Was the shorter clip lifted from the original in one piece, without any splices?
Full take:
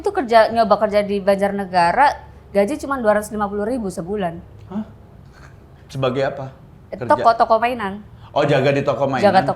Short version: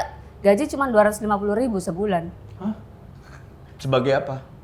yes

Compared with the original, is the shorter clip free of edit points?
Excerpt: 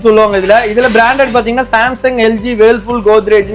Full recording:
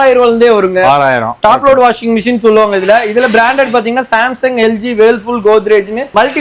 yes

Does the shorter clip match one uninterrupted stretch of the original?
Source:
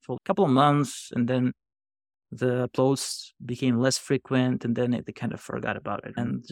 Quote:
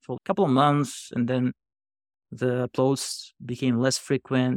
yes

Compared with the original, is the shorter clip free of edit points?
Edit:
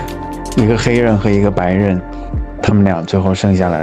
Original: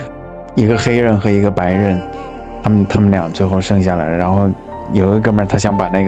no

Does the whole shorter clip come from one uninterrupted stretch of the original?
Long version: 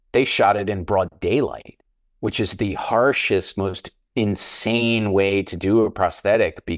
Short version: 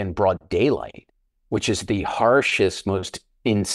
yes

